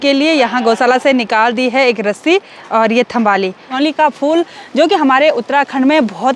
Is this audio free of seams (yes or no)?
no